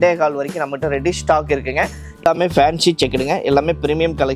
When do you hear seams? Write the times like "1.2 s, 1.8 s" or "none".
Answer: 2.0 s